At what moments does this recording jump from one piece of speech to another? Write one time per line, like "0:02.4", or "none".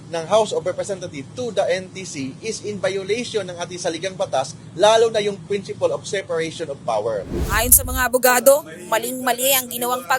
0:07.5